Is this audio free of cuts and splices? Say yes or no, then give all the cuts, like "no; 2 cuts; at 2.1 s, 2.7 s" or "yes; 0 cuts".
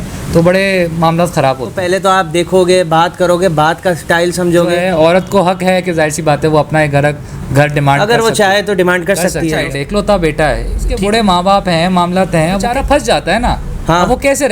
no; 5 cuts; at 1.7 s, 4.8 s, 9.6 s, 10.9 s, 12.7 s